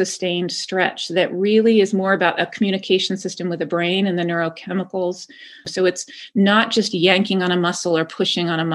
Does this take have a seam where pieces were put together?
yes; 1 cut; at 5.6 s

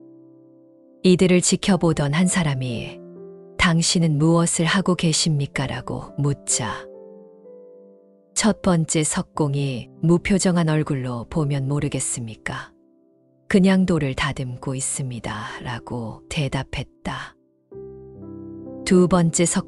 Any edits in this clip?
no; 0 cuts

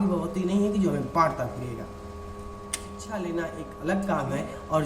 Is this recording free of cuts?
no; 1 cut; at 3.0 s

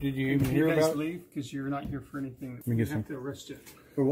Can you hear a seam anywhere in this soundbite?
yes; 1 cut; at 2.6 s

